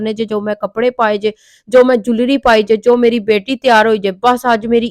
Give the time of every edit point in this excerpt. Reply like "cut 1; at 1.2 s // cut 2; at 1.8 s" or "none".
none